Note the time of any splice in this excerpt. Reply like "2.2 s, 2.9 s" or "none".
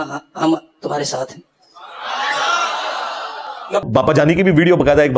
3.9 s